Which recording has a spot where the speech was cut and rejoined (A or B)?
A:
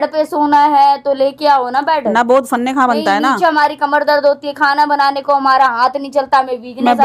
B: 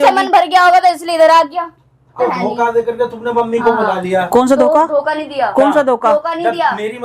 B